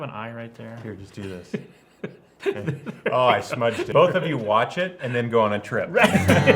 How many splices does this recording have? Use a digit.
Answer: 1